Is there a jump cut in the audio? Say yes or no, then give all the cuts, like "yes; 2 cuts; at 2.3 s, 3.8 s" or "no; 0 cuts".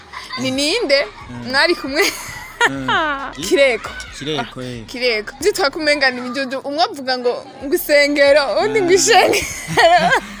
yes; 2 cuts; at 3.3 s, 5.4 s